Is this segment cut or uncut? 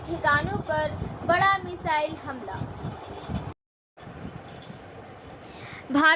uncut